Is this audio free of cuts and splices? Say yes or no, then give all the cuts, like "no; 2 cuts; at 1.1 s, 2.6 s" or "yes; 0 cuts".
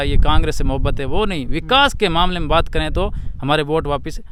yes; 0 cuts